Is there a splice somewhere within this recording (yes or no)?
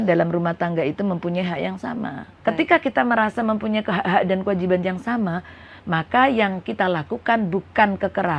yes